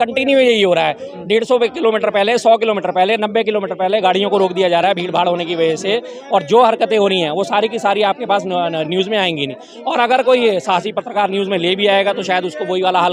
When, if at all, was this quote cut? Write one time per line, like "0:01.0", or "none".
none

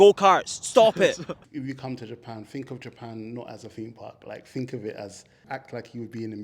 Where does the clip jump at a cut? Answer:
0:01.3
0:05.4

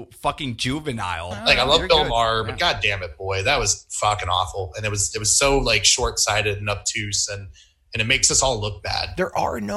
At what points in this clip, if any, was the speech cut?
0:01.3
0:09.0

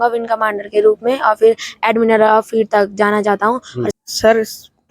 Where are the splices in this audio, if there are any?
0:03.9

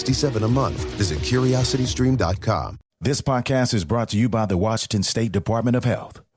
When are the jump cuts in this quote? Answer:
0:02.8

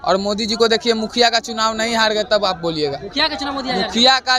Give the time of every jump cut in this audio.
none

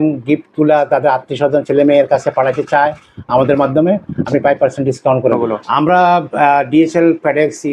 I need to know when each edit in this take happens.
0:05.4

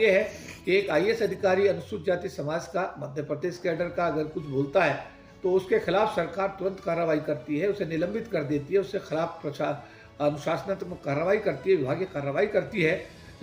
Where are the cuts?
none

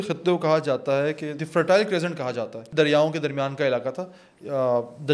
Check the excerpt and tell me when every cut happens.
0:01.4
0:02.6

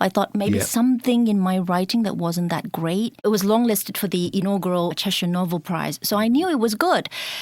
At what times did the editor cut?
0:03.2
0:04.9

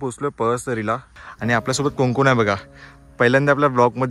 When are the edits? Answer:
0:01.1

